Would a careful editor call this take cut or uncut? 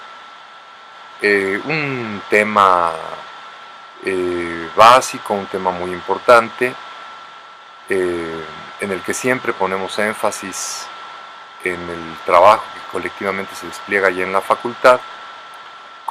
cut